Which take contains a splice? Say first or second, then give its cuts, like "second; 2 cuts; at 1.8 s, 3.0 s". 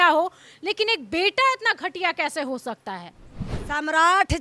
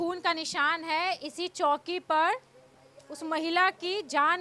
first; 1 cut; at 3.5 s